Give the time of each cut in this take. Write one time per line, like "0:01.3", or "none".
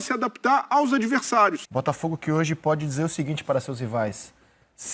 0:01.7